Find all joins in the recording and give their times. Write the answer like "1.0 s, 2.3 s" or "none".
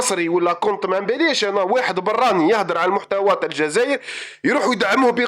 none